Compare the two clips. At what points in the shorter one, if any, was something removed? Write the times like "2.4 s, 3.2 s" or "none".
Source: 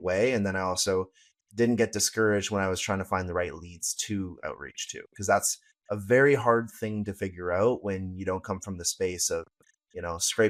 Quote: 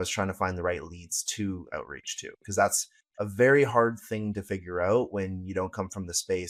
none